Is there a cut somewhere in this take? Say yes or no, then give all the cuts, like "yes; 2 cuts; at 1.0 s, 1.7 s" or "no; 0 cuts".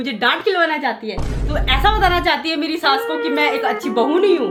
no; 0 cuts